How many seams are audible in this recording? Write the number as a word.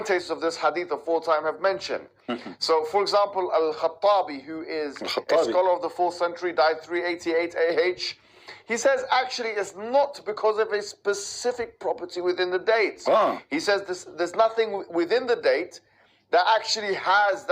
one